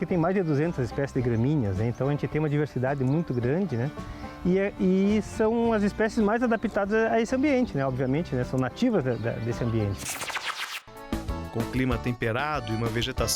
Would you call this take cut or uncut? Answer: cut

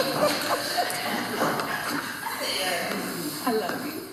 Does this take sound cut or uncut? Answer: uncut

